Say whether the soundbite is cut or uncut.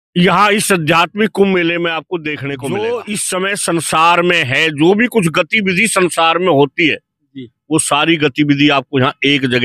cut